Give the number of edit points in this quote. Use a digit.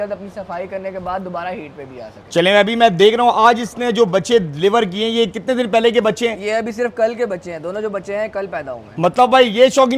0